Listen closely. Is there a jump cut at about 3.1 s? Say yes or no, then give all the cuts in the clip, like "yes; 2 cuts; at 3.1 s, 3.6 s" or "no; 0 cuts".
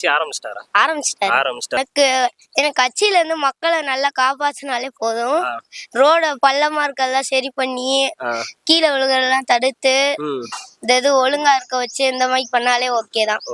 no; 1 cut; at 1.8 s